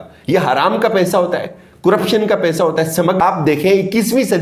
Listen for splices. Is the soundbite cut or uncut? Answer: cut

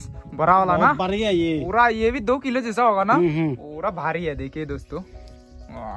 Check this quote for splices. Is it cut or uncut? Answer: uncut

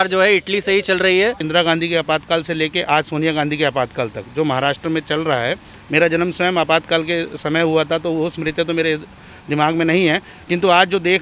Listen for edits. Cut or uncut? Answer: cut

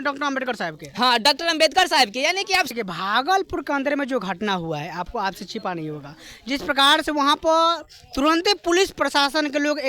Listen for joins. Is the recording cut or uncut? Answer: cut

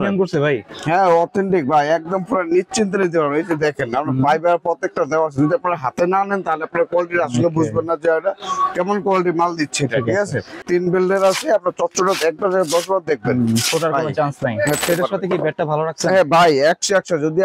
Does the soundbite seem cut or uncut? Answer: cut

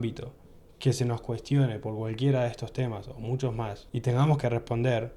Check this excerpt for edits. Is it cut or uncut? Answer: cut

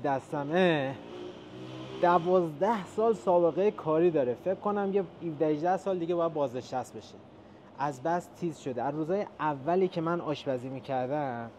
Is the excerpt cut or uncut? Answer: uncut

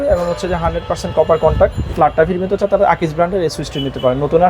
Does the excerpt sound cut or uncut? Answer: cut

